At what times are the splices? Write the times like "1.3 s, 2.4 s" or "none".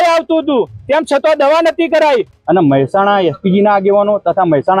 2.3 s